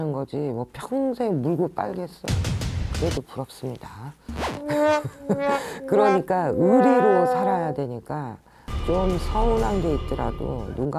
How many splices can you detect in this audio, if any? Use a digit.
0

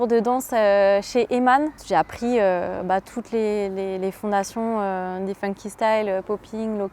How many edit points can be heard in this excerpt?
1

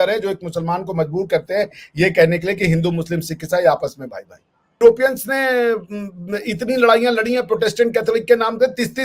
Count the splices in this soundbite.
1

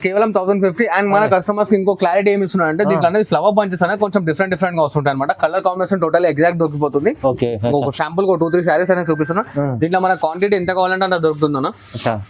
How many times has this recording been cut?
0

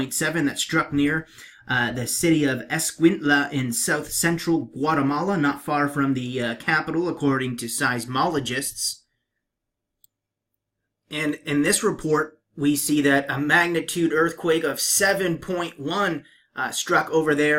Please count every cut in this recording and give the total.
0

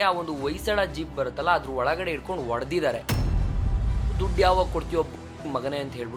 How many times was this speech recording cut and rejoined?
0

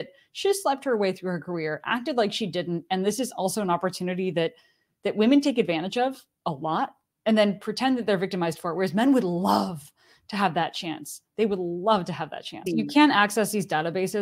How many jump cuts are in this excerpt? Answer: 1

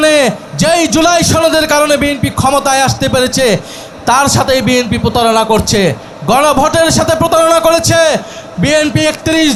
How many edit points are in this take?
0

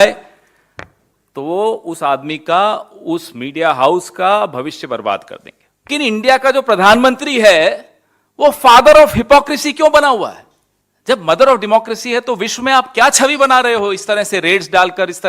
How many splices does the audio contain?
1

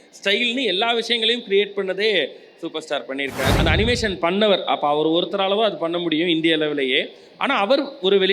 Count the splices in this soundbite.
1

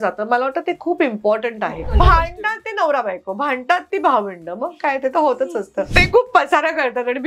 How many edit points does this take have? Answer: 2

